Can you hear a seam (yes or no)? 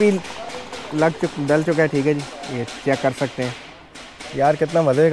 no